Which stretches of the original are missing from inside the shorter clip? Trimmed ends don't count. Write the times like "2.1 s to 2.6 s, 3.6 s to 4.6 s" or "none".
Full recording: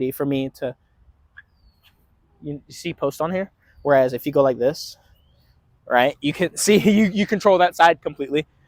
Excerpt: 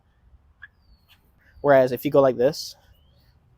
2.2 s to 3.6 s